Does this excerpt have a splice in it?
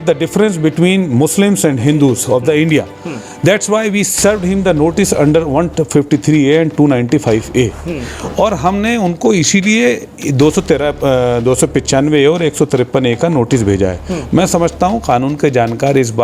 no; 0 cuts

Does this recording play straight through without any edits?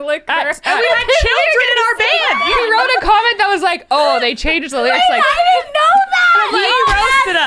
no; 1 cut; at 2.4 s

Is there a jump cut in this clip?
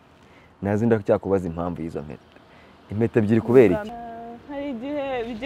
yes; 1 cut; at 3.9 s

